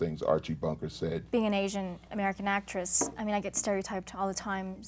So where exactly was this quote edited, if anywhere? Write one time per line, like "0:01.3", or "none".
0:01.2

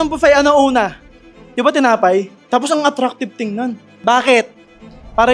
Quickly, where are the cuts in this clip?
0:02.4
0:04.0

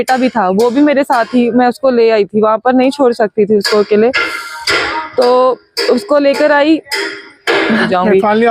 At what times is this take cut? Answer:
none

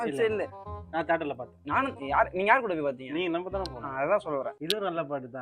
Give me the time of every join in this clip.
0:04.5

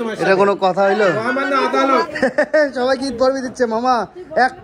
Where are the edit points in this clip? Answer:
0:02.1

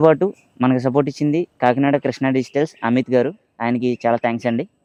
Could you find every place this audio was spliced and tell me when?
none

